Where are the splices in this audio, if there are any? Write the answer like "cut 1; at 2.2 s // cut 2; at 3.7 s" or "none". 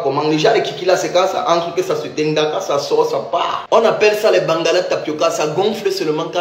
none